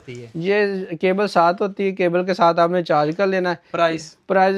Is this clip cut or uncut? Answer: uncut